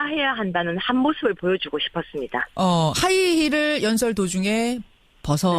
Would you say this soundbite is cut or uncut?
uncut